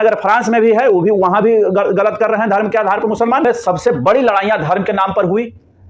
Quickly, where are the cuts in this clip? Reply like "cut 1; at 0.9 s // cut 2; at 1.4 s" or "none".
cut 1; at 3.4 s